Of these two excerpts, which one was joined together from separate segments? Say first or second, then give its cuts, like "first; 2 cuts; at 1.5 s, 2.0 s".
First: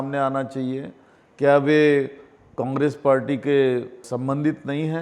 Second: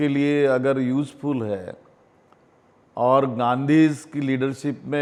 first; 1 cut; at 4.1 s